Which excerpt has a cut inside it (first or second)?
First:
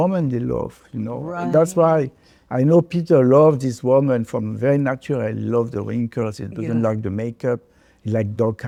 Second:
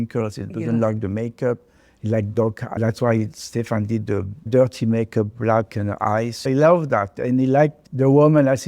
second